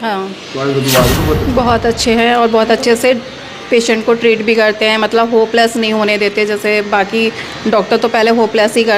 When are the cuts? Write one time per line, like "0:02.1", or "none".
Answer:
0:01.1